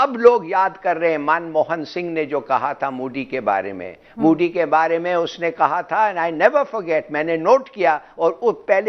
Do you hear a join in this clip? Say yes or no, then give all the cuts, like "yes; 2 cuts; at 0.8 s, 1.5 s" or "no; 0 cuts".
no; 0 cuts